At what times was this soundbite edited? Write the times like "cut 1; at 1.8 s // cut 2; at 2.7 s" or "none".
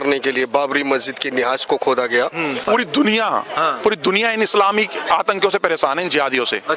cut 1; at 2.6 s